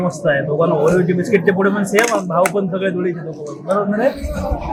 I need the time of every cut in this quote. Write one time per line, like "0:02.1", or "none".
none